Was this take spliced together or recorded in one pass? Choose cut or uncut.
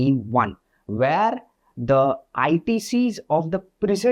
uncut